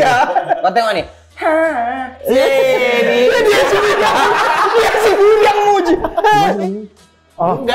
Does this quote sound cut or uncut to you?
cut